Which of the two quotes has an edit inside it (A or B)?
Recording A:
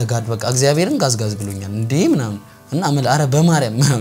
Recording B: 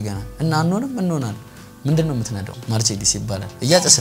B